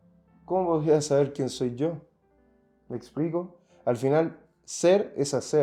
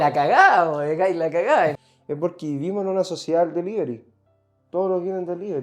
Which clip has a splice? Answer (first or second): second